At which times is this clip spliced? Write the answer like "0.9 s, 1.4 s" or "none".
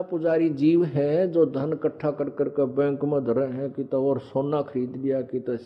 none

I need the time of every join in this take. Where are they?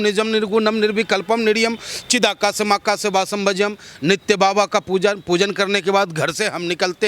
none

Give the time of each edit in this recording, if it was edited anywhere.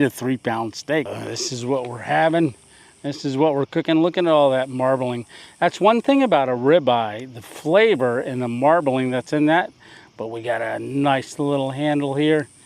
1.1 s

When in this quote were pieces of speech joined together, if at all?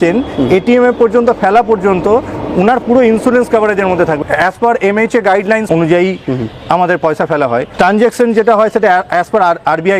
4.2 s, 5.6 s, 7.7 s

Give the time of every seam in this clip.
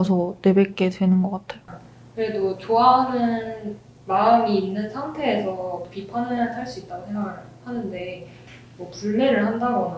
1.6 s

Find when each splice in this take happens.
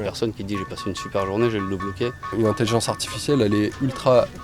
2.3 s

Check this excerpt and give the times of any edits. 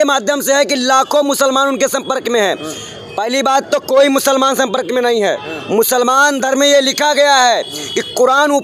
none

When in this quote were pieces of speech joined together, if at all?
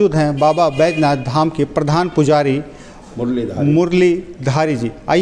none

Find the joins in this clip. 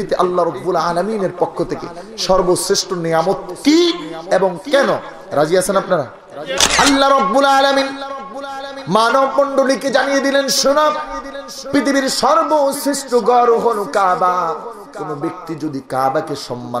6.6 s

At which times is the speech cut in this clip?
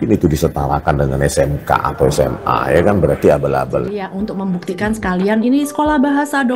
4.0 s

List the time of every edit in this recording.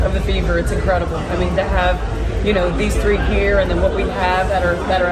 none

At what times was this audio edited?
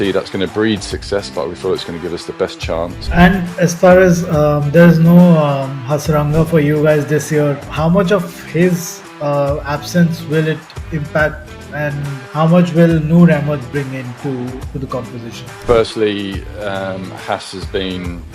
3.0 s, 7.6 s, 12.2 s

